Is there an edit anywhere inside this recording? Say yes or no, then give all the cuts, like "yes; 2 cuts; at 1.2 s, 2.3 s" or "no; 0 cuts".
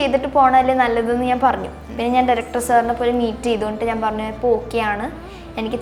no; 0 cuts